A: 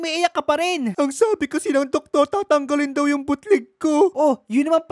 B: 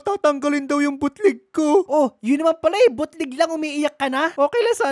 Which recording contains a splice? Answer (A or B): A